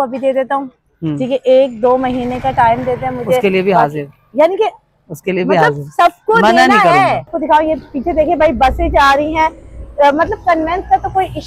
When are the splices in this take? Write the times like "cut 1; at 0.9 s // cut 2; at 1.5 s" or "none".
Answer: cut 1; at 7.3 s